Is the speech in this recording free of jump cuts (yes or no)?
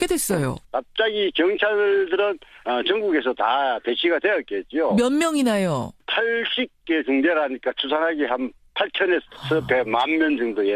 yes